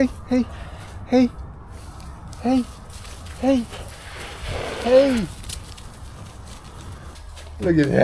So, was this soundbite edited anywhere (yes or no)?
yes